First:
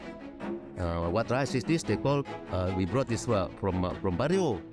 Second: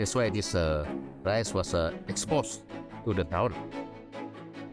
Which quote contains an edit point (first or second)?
first